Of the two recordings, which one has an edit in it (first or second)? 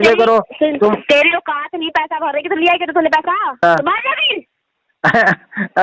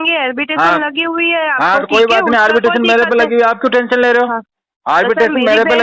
first